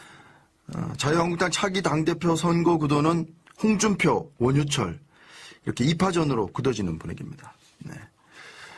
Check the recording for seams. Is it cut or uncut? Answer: uncut